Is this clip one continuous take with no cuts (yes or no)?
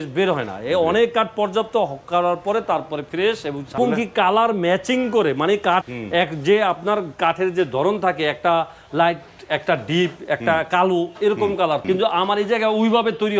no